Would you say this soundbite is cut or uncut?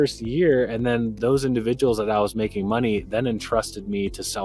cut